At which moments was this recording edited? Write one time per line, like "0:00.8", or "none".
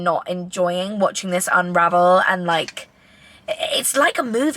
none